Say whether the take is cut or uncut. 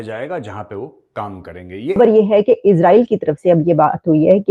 cut